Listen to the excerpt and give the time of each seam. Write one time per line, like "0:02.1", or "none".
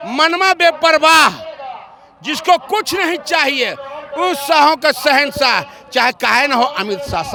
none